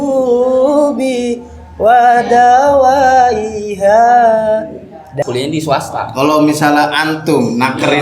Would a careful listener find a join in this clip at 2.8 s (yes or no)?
no